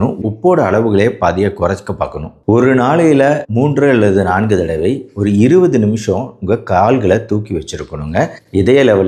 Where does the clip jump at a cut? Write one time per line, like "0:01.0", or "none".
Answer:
0:02.3